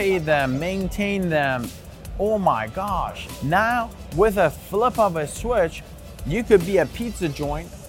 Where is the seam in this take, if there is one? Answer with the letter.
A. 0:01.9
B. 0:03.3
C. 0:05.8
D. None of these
B